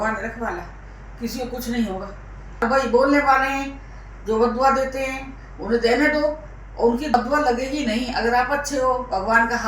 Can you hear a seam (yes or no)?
yes